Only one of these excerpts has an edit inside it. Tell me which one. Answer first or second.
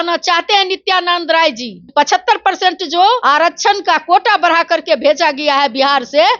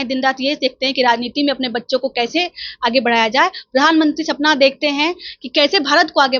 first